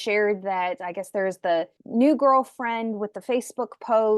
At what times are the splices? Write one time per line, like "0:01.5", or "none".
0:01.8